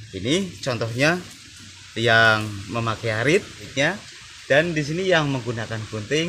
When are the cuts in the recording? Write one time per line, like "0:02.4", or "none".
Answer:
0:03.7